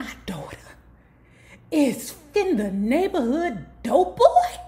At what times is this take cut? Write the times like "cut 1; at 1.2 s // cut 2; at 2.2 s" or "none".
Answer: cut 1; at 2.1 s